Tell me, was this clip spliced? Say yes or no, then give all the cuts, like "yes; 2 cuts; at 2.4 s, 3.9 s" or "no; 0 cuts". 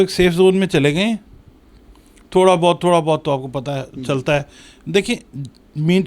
no; 0 cuts